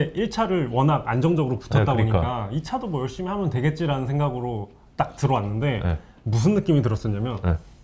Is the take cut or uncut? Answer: uncut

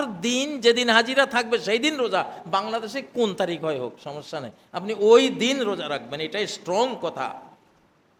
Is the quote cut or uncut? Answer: uncut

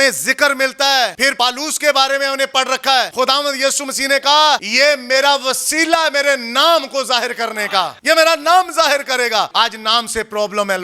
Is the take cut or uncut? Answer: cut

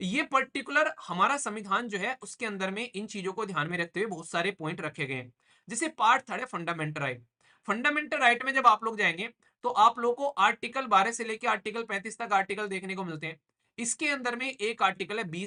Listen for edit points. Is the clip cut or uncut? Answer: uncut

